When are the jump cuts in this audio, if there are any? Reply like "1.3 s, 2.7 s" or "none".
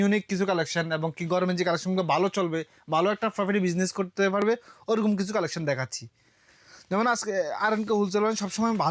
none